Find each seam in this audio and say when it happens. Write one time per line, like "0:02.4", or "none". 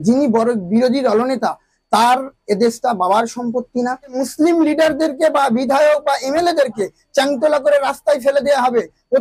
0:04.2